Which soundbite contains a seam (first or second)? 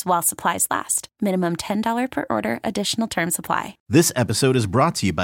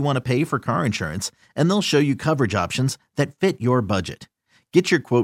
first